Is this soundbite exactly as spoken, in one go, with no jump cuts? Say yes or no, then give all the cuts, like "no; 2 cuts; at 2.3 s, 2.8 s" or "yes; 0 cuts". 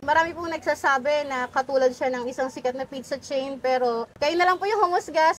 yes; 0 cuts